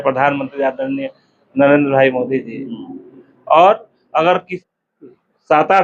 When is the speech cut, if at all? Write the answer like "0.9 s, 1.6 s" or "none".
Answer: 4.6 s